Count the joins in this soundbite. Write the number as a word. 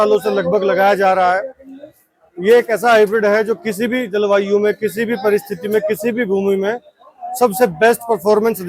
zero